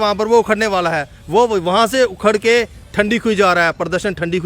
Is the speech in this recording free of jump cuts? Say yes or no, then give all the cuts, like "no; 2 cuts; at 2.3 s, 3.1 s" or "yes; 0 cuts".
yes; 0 cuts